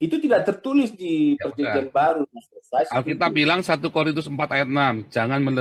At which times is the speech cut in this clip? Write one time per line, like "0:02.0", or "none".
none

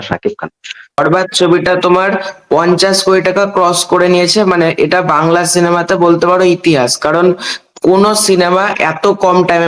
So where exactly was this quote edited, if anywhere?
0:01.0

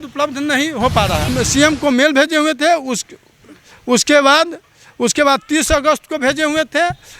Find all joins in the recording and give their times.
0:01.3

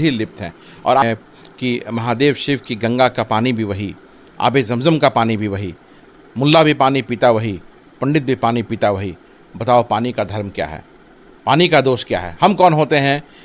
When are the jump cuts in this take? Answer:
0:01.0

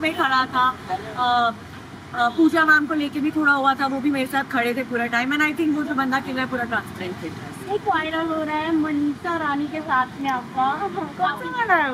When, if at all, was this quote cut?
0:07.8

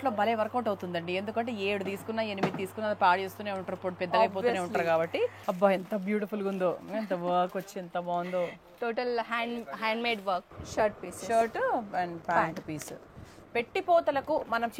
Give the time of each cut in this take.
0:05.4
0:10.5

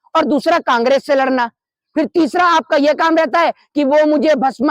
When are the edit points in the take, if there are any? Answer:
none

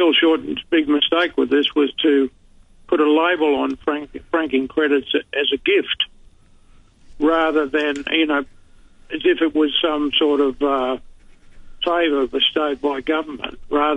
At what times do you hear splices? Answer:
none

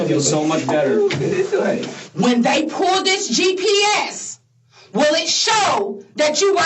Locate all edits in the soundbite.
0:02.0

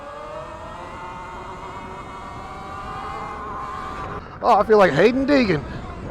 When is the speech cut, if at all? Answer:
0:04.2

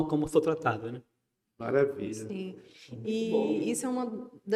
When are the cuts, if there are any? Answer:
none

